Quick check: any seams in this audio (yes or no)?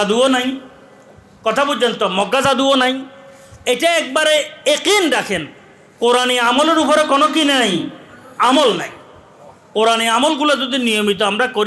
no